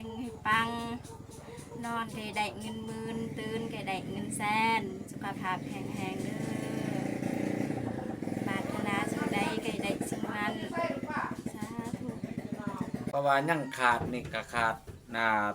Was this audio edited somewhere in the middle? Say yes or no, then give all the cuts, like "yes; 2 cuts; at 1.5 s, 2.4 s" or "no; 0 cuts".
yes; 1 cut; at 13.1 s